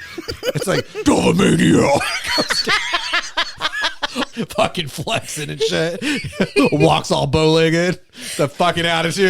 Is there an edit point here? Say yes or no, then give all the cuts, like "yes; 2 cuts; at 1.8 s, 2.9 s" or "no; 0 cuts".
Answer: yes; 2 cuts; at 1.0 s, 4.3 s